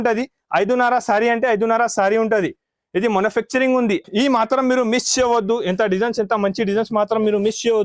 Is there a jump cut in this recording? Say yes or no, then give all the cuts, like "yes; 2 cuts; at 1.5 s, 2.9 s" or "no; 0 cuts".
yes; 1 cut; at 4.0 s